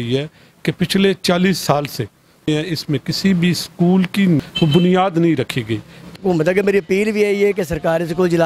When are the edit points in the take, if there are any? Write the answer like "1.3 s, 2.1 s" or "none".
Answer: 4.4 s, 6.1 s